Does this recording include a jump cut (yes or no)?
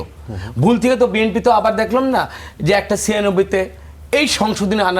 no